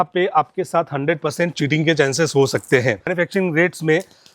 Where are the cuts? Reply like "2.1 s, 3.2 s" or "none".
3.1 s